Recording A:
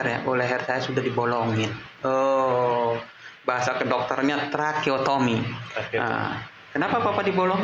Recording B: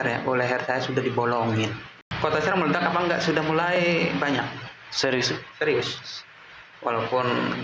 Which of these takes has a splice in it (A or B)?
B